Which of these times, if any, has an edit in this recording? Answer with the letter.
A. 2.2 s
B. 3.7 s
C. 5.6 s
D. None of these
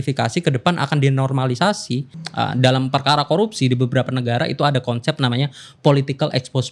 A